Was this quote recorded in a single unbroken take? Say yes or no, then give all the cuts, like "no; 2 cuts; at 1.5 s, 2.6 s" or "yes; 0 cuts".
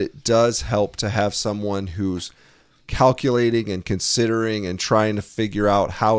yes; 0 cuts